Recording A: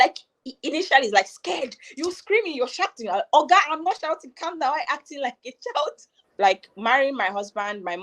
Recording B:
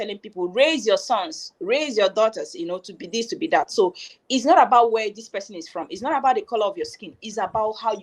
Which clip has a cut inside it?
A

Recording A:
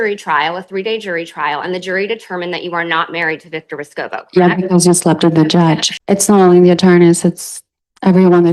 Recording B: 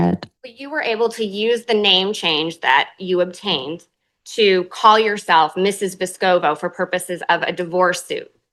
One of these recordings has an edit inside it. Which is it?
A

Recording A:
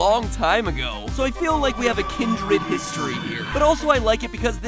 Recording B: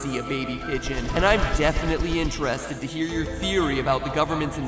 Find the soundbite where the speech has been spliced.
B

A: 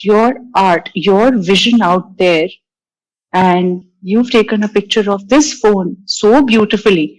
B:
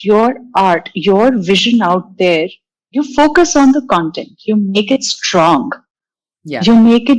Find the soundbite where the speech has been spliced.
B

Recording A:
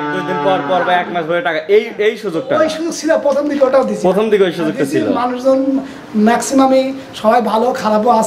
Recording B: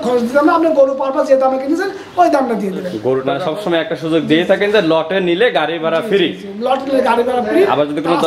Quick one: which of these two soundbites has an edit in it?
B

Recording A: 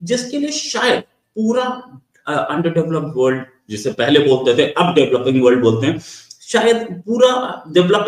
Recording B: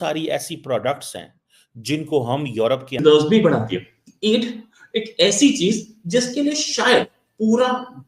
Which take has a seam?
B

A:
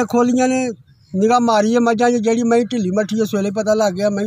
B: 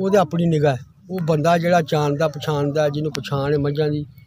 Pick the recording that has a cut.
B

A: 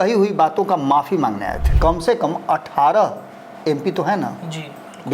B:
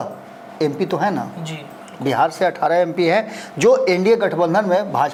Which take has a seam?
A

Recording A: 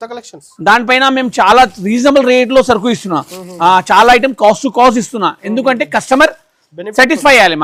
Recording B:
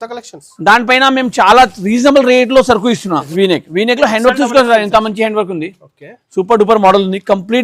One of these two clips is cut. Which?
B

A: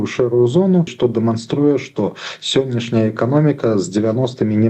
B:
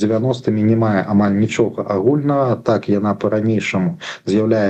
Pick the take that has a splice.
A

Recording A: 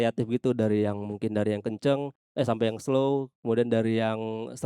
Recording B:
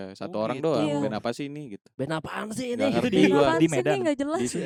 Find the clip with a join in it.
A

